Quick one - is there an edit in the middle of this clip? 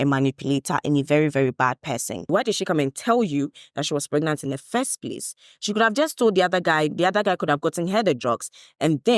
yes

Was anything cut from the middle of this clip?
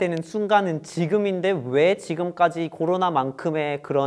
no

